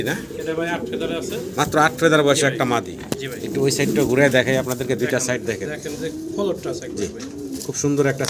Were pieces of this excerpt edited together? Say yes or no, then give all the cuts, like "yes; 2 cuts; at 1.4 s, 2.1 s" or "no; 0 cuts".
no; 0 cuts